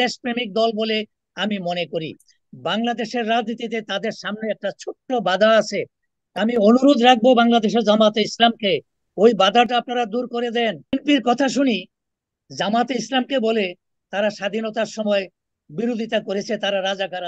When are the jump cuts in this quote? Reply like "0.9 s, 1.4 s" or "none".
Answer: 10.8 s